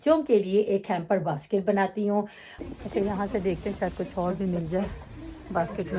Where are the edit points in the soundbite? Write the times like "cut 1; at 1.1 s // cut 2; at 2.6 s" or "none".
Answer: cut 1; at 2.6 s